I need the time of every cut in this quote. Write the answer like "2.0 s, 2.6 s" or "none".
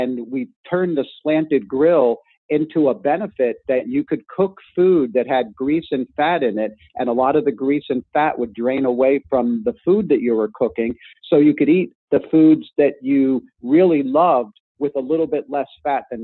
none